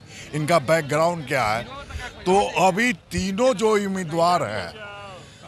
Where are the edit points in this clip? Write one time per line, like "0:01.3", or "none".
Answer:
none